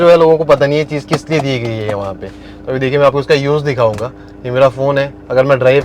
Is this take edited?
no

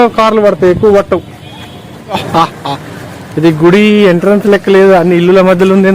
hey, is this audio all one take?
no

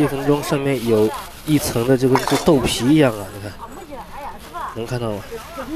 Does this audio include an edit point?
no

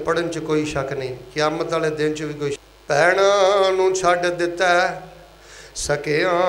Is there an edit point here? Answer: yes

